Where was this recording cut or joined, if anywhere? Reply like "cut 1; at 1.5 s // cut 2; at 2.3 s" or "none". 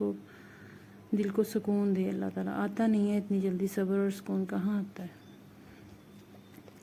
none

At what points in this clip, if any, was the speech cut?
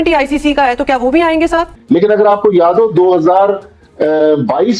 cut 1; at 1.7 s

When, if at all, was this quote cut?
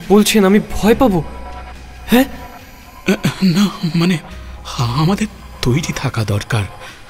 cut 1; at 1.7 s // cut 2; at 2.9 s // cut 3; at 4.4 s // cut 4; at 5.4 s

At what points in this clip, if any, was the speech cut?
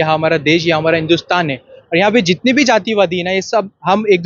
none

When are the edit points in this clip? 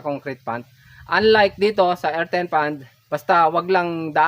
cut 1; at 2.9 s

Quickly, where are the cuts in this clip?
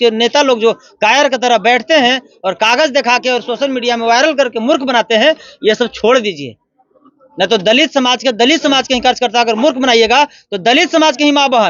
none

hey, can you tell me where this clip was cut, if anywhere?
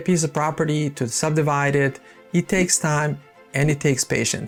none

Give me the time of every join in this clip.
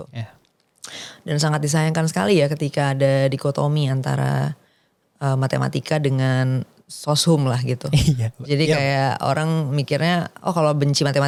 none

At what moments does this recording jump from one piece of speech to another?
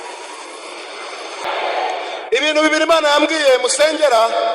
cut 1; at 1.4 s

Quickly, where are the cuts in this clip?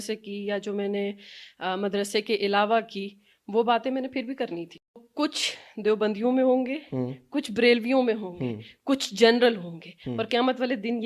cut 1; at 5.1 s

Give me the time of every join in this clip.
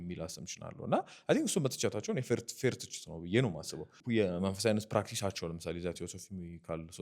cut 1; at 3.9 s

